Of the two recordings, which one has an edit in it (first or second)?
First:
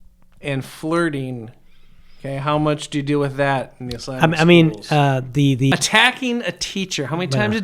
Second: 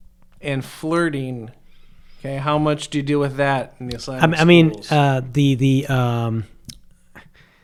first